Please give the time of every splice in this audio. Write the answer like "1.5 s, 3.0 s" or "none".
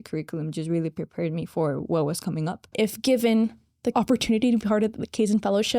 2.7 s

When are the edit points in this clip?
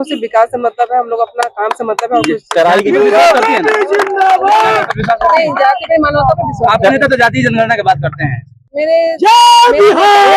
none

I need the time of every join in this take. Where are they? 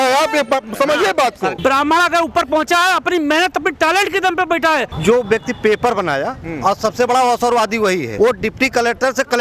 1.6 s, 4.9 s, 8.1 s

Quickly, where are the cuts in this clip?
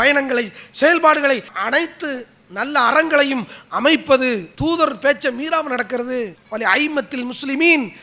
1.5 s, 4.5 s, 6.4 s

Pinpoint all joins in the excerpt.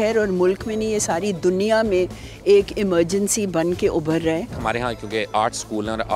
4.5 s

